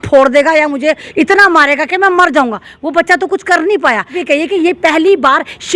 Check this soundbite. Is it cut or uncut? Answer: cut